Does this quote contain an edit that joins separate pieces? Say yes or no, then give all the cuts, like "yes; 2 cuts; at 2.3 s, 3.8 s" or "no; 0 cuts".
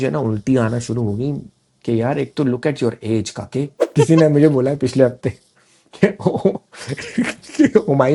yes; 1 cut; at 3.8 s